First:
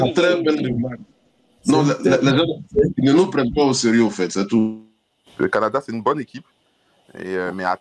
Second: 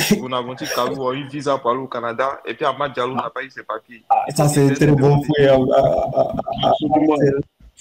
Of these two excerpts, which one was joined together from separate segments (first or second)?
first